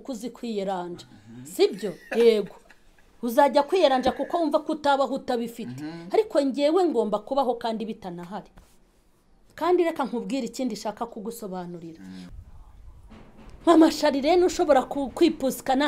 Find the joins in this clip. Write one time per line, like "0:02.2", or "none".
0:12.3

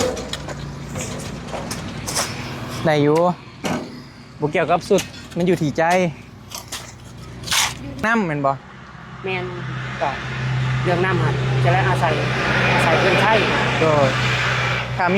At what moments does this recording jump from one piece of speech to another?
0:08.0

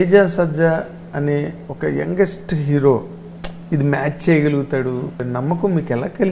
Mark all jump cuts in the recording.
0:05.3

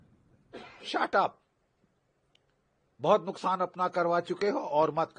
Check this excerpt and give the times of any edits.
none

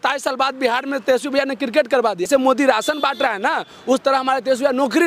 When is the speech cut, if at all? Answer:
0:02.3

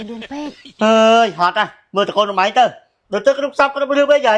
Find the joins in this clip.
none

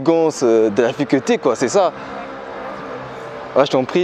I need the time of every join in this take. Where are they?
none

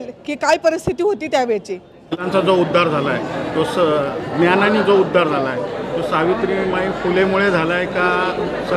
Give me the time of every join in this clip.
0:02.3

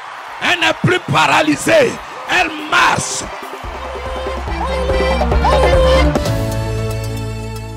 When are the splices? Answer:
0:06.2

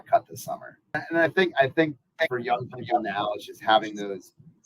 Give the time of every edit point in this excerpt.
0:01.0

